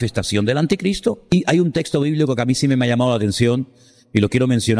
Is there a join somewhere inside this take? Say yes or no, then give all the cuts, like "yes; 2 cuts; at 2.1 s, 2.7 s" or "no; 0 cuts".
yes; 1 cut; at 1.3 s